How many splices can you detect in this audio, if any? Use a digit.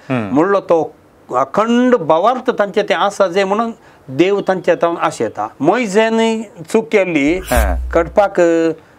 1